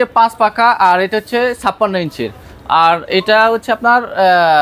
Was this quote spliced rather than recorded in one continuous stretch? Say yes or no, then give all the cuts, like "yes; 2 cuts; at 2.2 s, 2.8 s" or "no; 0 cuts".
no; 0 cuts